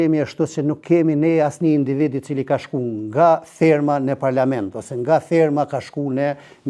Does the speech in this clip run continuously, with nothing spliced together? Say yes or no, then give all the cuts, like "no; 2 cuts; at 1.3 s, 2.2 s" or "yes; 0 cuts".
yes; 0 cuts